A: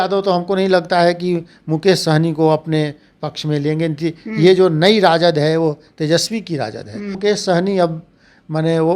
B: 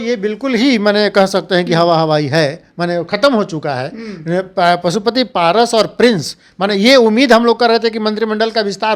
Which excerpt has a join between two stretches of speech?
A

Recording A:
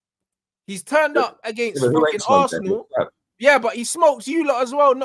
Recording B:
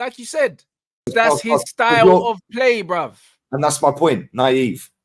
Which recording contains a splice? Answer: B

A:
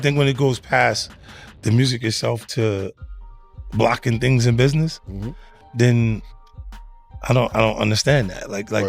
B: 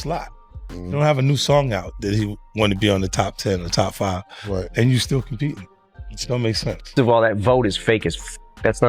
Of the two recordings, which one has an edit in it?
B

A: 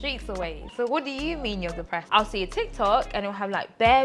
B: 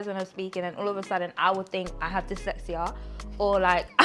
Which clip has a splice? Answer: A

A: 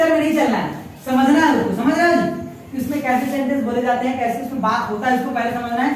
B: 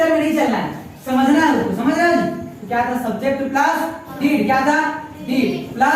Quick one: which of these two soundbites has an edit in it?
B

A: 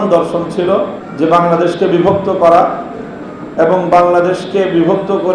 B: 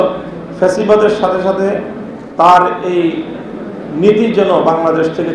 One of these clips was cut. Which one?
A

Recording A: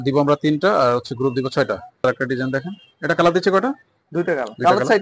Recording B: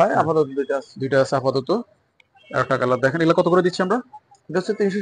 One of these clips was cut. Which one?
A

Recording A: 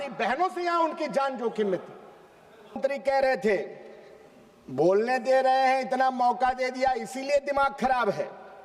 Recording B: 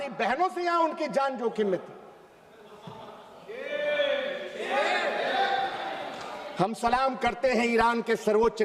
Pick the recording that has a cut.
A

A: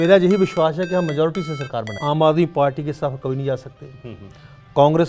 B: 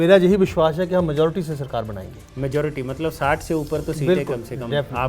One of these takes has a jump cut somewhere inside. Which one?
A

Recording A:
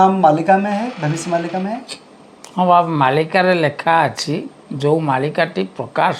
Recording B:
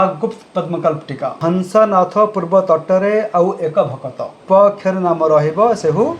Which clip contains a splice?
B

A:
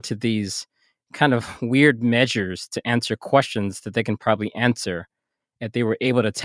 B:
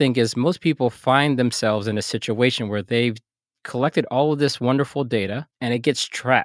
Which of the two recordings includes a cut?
B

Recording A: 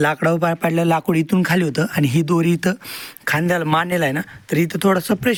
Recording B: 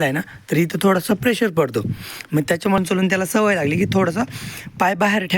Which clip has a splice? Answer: B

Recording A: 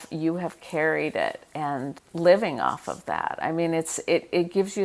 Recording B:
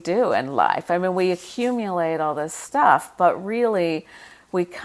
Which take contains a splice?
A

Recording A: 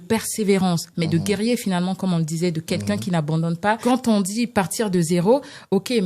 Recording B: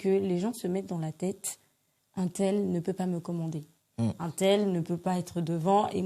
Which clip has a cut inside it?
A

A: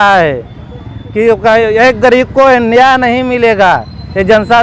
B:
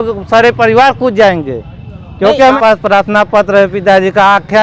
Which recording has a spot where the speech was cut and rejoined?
B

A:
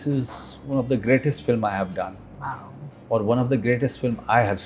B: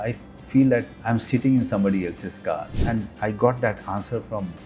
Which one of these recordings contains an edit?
B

